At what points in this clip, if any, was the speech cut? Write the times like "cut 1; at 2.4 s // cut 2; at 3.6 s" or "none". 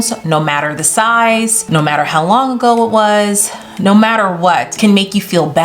cut 1; at 1.6 s // cut 2; at 4.7 s

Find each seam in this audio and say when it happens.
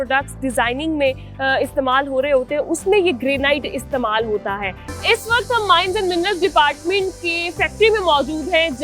cut 1; at 4.9 s

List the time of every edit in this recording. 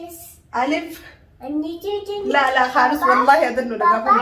none

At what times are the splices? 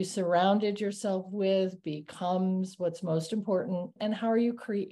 cut 1; at 4.0 s

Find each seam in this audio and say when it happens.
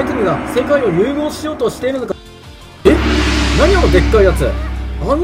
cut 1; at 2.1 s

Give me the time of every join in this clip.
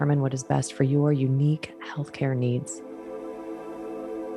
cut 1; at 2.7 s

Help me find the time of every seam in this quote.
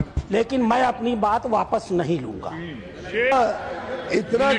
cut 1; at 3.3 s

